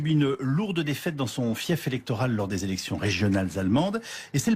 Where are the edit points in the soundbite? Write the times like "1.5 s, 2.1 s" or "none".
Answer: none